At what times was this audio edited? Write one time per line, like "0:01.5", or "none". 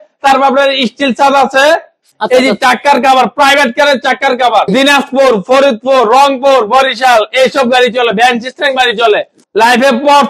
0:02.0
0:04.7
0:09.4